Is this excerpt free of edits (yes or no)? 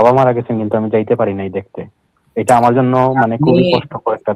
yes